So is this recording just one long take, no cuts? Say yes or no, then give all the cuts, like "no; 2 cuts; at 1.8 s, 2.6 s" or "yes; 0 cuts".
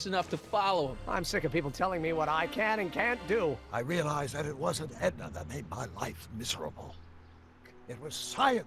no; 3 cuts; at 1.0 s, 3.6 s, 7.7 s